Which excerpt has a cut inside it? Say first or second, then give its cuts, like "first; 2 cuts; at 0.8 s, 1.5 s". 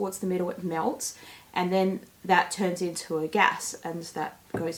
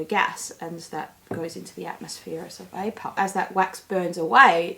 second; 1 cut; at 3.1 s